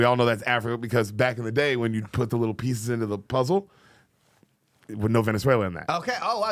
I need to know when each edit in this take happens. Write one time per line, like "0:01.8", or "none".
none